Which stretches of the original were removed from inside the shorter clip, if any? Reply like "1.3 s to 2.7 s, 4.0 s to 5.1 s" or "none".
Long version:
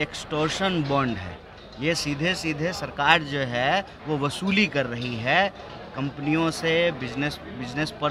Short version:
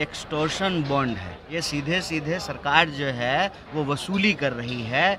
1.4 s to 1.7 s